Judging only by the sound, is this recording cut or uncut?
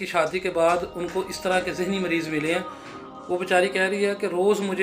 uncut